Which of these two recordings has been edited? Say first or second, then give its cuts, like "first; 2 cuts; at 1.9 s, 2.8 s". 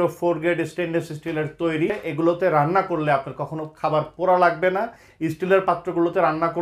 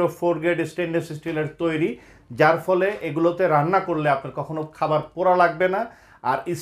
first; 2 cuts; at 2.0 s, 5.0 s